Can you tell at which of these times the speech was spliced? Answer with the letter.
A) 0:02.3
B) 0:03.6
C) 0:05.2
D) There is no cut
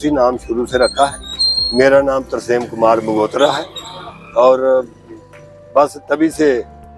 D